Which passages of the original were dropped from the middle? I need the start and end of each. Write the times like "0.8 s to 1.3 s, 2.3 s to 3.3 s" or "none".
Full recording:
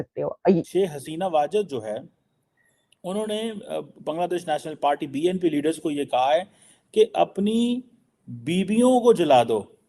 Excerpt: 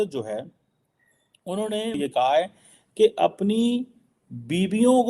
3.5 s to 5.9 s